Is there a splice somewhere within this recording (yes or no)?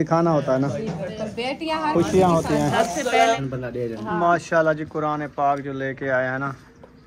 yes